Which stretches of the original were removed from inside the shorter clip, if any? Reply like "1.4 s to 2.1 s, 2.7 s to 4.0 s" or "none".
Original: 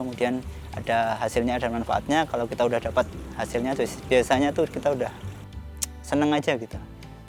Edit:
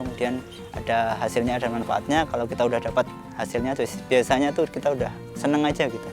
5.2 s to 5.9 s